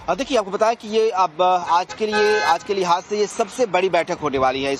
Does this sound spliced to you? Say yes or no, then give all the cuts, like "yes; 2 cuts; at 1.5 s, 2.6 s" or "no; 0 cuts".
no; 0 cuts